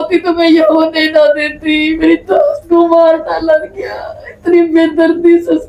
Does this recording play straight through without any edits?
yes; 0 cuts

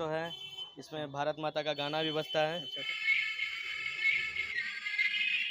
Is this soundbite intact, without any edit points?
no; 1 cut; at 2.8 s

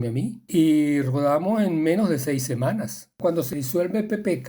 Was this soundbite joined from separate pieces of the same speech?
yes; 1 cut; at 3.4 s

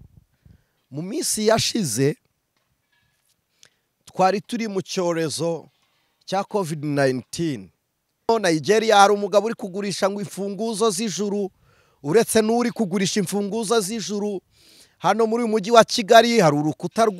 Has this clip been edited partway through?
yes; 1 cut; at 8.3 s

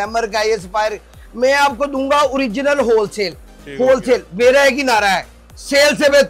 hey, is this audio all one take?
yes; 0 cuts

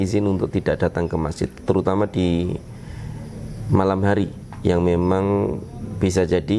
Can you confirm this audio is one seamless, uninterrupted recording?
yes; 0 cuts

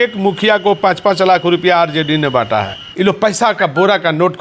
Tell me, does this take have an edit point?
yes; 1 cut; at 2.8 s

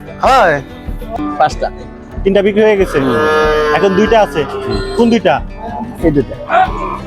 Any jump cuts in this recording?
yes; 1 cut; at 1.1 s

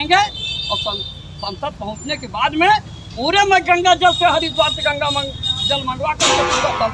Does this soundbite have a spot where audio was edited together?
no; 0 cuts

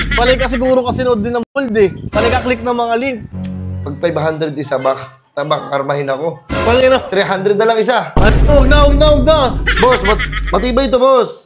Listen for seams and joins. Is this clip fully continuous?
no; 1 cut; at 3.3 s

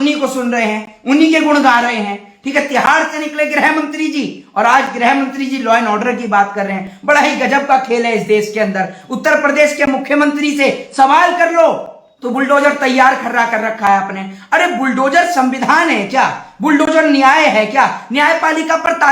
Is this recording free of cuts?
yes; 0 cuts

